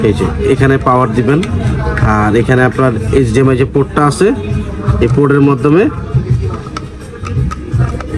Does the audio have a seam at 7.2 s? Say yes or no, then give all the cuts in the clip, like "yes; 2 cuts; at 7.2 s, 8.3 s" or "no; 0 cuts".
no; 0 cuts